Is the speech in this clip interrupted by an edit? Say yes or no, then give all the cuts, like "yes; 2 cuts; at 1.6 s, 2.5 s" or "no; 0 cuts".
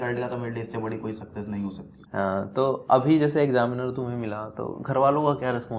yes; 1 cut; at 1.9 s